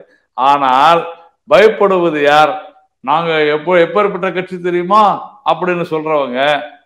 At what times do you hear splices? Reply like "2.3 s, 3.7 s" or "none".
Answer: none